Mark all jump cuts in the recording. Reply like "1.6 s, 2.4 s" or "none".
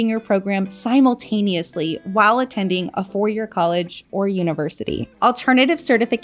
5.1 s